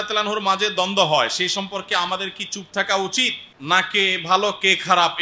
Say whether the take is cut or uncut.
cut